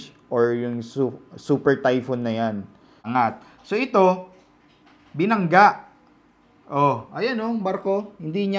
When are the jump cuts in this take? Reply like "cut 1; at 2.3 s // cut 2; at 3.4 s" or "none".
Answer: cut 1; at 3.1 s